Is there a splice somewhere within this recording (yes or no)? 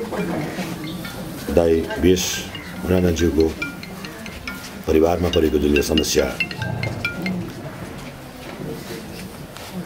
no